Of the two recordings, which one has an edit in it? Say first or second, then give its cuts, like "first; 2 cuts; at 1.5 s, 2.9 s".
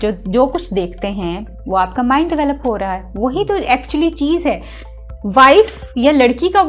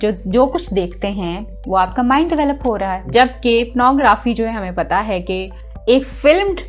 second; 1 cut; at 3.0 s